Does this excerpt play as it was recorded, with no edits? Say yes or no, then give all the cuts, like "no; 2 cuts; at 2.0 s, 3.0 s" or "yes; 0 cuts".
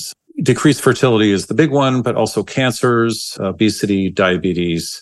no; 1 cut; at 3.3 s